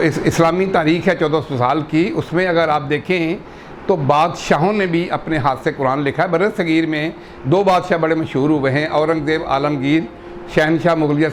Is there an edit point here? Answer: no; 0 cuts

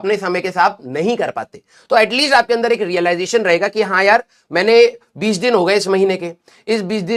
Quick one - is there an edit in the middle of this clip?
no; 0 cuts

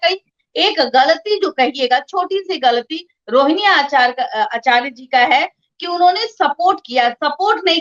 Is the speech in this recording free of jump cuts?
yes; 0 cuts

